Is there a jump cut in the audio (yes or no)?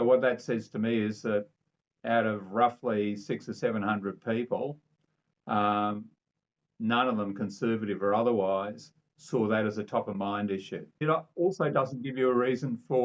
yes